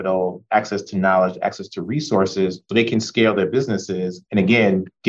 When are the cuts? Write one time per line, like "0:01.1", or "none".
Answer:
0:04.2